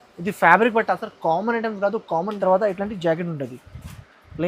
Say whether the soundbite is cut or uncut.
cut